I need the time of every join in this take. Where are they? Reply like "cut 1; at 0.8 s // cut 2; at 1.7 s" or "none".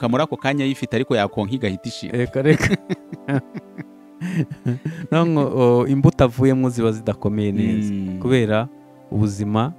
none